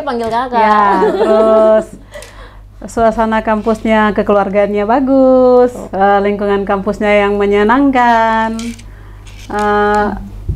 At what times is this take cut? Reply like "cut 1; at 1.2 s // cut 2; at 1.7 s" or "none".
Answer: none